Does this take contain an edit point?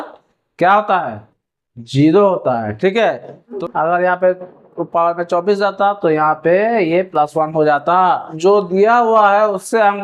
yes; 2 cuts; at 3.5 s, 8.3 s

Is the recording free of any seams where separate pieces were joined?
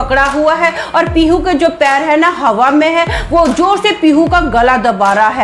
yes; 0 cuts

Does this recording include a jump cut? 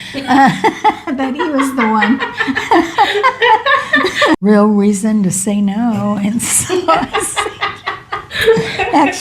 yes; 1 cut; at 4.4 s

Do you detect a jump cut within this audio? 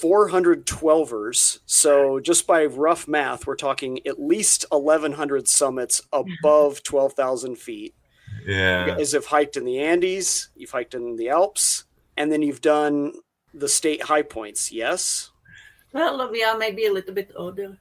yes; 1 cut; at 12.1 s

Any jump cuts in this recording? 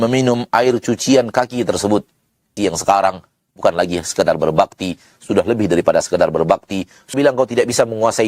yes; 2 cuts; at 2.5 s, 7.1 s

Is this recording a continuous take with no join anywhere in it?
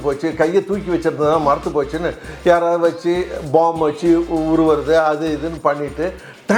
yes; 0 cuts

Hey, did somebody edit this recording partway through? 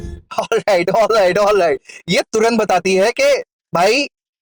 no; 0 cuts

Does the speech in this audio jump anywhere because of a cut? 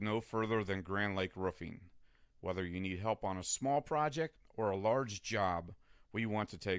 no; 0 cuts

